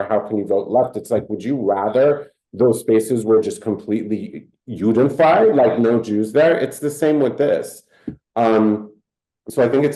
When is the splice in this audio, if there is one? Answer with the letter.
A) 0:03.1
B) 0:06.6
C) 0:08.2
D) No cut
D